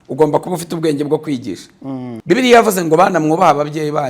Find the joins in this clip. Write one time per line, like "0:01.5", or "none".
0:02.1